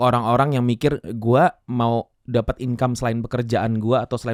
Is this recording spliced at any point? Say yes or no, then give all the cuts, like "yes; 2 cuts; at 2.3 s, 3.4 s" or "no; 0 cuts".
no; 0 cuts